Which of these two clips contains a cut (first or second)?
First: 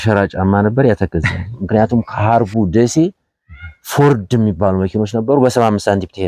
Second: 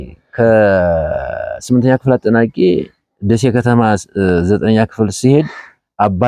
first